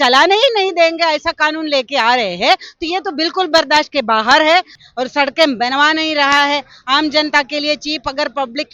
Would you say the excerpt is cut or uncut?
cut